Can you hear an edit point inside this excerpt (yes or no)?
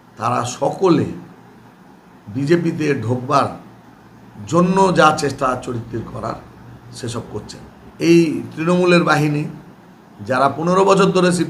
yes